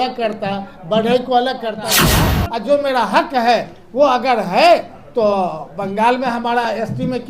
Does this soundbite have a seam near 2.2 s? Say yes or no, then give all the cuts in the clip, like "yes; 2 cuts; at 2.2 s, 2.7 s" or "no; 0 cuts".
yes; 1 cut; at 2.2 s